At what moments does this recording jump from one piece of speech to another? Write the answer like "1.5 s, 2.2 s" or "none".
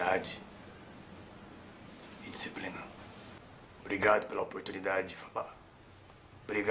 3.4 s

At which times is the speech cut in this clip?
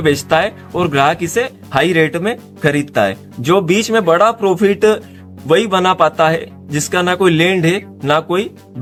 none

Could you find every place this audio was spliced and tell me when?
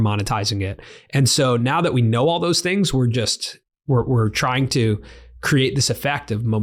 none

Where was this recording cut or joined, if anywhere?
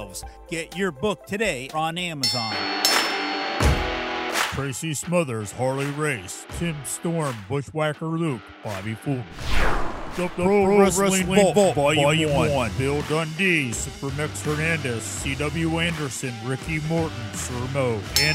2.5 s

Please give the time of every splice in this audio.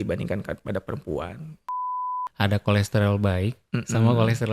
2.0 s

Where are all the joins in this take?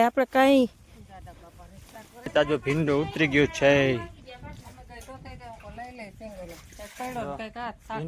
2.3 s

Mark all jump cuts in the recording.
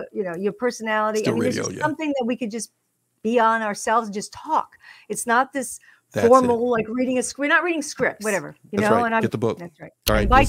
9.2 s

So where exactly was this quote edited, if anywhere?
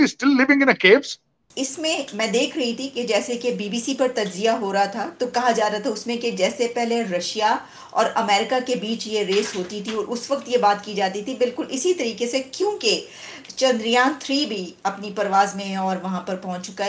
1.4 s

